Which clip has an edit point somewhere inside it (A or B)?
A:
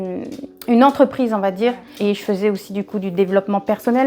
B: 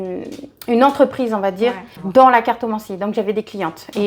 A